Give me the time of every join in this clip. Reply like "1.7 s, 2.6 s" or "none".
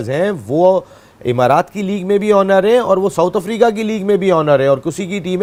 none